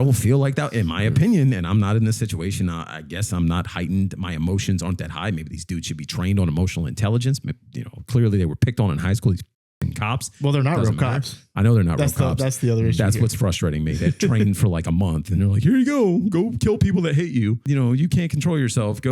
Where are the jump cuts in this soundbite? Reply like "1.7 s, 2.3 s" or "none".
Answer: 17.6 s